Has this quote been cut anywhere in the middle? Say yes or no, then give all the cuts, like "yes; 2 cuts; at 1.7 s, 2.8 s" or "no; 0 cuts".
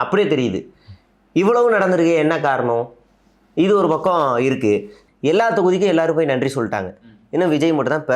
yes; 1 cut; at 5.0 s